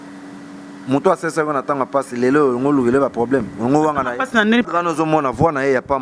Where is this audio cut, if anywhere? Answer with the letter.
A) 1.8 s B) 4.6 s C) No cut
B